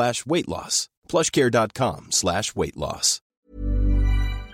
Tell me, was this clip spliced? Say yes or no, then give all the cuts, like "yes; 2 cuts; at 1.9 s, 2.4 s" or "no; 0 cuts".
yes; 1 cut; at 3.5 s